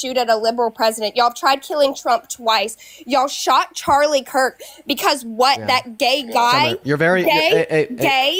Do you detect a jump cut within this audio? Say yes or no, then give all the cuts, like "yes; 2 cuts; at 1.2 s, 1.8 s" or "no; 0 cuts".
no; 0 cuts